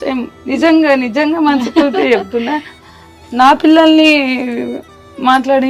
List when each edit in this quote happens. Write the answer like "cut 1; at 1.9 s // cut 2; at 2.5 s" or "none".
none